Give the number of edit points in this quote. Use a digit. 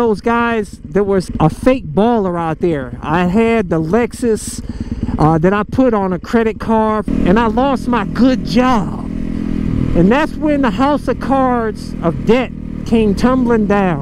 2